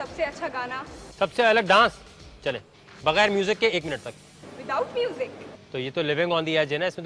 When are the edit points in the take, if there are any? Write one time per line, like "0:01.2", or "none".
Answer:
none